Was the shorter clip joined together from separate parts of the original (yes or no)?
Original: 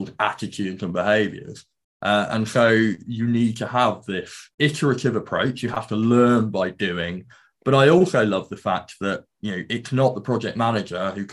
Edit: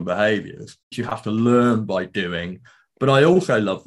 yes